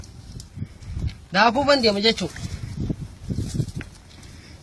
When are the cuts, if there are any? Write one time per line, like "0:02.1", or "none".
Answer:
none